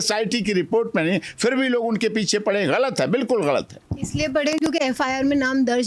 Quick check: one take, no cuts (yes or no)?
yes